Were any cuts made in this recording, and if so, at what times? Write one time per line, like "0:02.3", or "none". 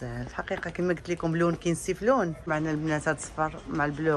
0:02.4